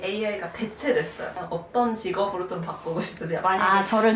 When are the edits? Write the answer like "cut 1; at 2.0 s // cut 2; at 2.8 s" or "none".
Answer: cut 1; at 1.3 s